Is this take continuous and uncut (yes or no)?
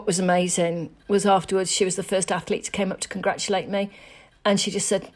no